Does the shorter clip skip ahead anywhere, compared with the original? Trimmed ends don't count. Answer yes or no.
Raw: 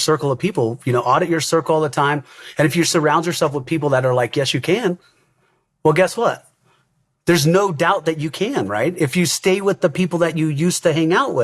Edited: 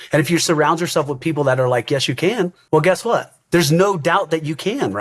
yes